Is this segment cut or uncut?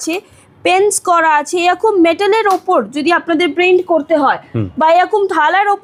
uncut